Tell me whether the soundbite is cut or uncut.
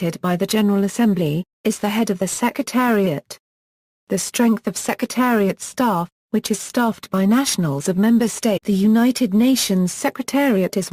uncut